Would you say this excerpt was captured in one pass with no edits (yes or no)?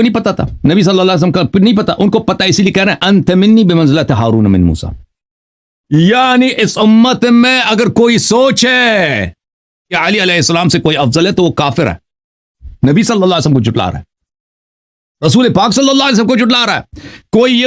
yes